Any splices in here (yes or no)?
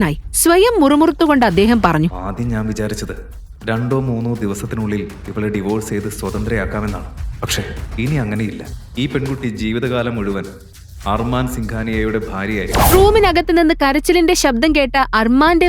yes